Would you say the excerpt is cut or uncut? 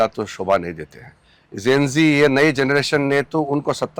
uncut